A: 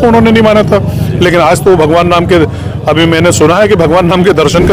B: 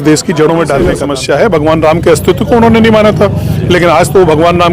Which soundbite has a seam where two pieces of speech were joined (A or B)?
B